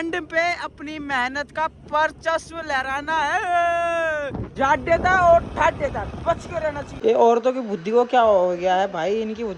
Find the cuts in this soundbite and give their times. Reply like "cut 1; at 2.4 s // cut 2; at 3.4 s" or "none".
cut 1; at 4.4 s // cut 2; at 6.9 s